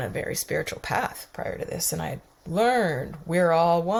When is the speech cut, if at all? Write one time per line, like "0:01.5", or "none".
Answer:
none